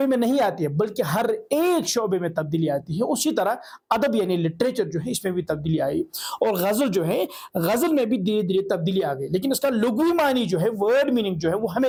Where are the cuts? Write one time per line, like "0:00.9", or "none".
none